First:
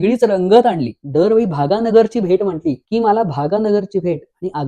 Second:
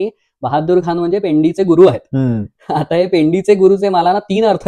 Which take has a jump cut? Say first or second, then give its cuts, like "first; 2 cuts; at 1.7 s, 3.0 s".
first; 2 cuts; at 0.9 s, 2.8 s